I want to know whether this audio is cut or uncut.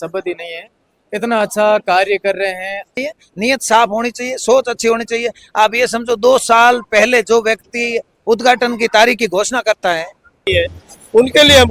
cut